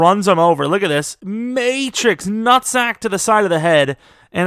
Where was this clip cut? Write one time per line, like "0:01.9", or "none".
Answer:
0:01.2